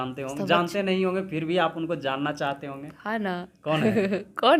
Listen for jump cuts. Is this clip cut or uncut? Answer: uncut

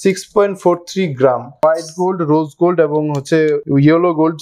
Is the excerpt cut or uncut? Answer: cut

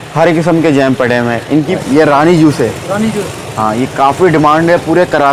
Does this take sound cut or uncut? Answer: cut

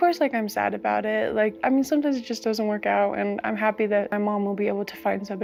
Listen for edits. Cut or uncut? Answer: uncut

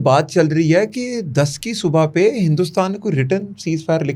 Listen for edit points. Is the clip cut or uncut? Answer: uncut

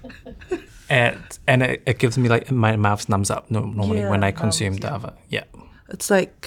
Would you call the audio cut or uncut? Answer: uncut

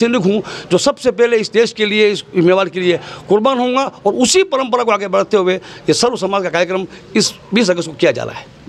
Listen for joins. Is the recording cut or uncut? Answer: uncut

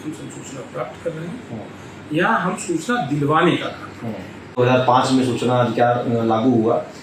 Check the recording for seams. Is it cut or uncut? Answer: cut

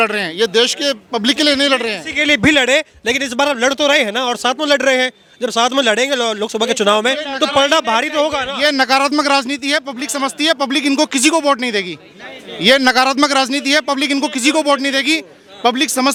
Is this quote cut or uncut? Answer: uncut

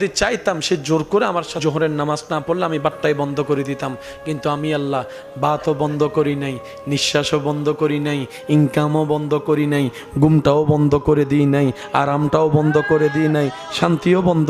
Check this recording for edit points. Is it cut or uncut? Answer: cut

